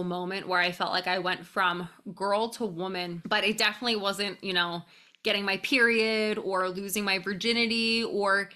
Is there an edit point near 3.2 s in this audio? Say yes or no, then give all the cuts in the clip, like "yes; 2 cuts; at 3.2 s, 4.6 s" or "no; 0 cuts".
yes; 1 cut; at 3.2 s